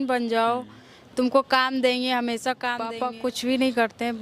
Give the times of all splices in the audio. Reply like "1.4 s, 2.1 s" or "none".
3.1 s